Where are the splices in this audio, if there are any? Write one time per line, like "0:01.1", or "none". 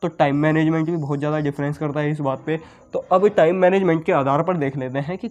none